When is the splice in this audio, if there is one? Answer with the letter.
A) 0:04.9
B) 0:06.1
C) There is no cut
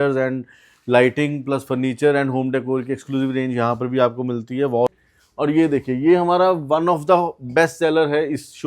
A